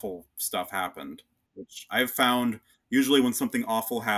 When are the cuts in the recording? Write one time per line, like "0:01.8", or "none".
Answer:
0:01.5